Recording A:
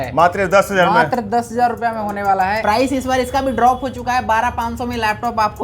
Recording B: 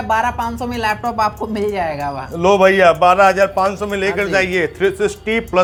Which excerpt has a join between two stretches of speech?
A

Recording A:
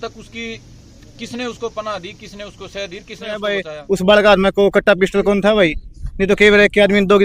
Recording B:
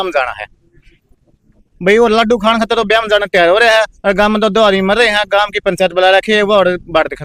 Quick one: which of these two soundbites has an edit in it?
A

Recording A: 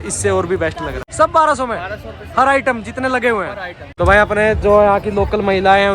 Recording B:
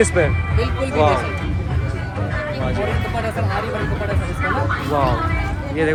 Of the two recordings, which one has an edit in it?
A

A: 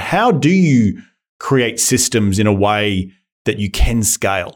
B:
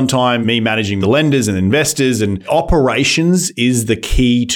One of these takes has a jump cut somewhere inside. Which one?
B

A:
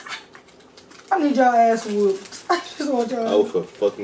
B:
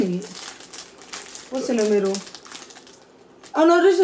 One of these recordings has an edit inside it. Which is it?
A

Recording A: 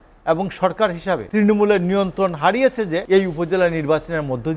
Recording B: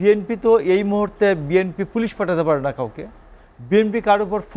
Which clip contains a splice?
A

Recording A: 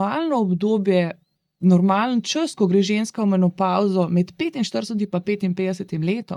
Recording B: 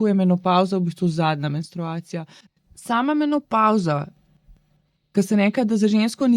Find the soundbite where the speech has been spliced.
B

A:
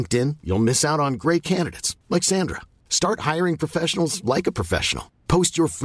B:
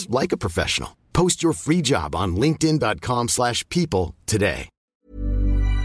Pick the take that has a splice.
B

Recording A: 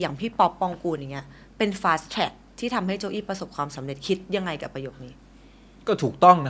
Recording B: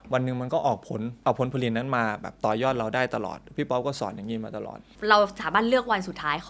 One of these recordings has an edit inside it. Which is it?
B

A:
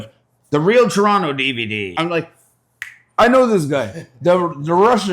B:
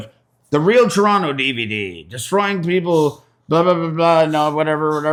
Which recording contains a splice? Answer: A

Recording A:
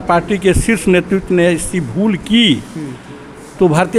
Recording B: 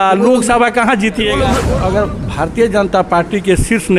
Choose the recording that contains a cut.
B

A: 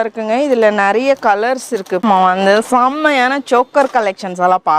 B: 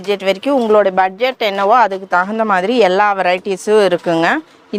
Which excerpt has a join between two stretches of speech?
A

